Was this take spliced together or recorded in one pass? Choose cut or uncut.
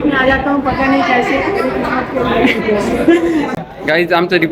cut